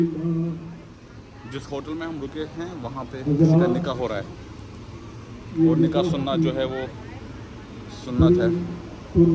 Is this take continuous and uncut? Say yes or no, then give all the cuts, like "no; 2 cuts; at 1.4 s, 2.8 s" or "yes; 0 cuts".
yes; 0 cuts